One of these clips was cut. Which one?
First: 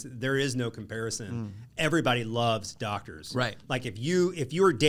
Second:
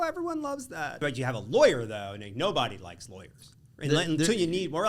second; 1 cut; at 1.0 s

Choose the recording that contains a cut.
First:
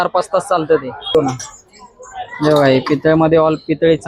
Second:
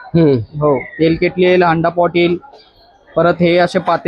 first; 1 cut; at 1.1 s

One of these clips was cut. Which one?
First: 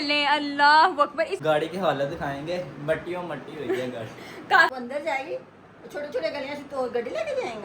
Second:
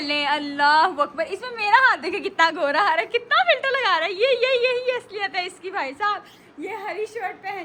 first; 2 cuts; at 1.4 s, 4.7 s

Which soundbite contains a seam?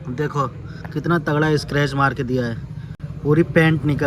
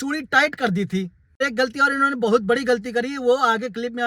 second; 1 cut; at 1.4 s

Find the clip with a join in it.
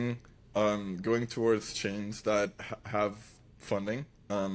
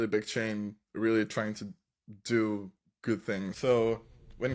second; 1 cut; at 3.5 s

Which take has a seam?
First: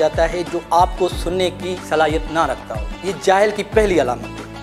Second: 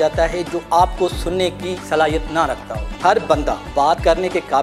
second; 1 cut; at 2.9 s

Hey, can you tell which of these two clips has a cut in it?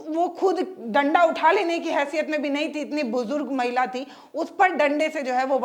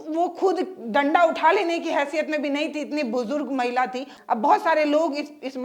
second; 1 cut; at 4.1 s

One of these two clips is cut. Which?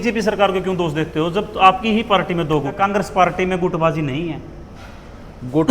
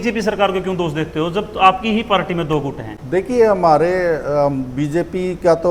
first; 1 cut; at 2.8 s

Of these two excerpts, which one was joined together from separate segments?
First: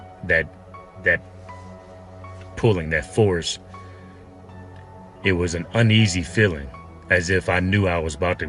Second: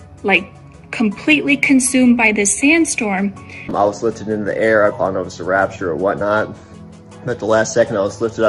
second; 1 cut; at 3.4 s

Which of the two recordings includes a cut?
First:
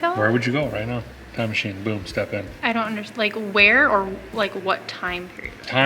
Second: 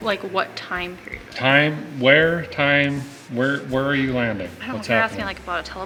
first; 1 cut; at 2.5 s

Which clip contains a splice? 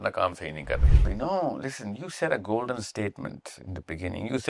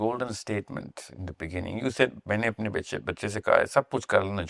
first; 1 cut; at 1.1 s

